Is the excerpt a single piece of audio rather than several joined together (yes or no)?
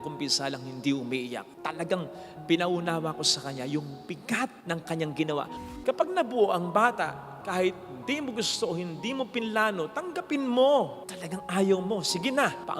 no